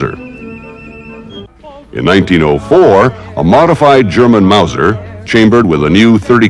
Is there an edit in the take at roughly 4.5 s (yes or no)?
no